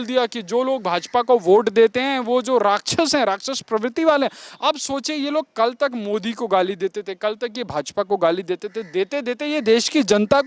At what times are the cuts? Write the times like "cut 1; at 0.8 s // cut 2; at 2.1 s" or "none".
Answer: none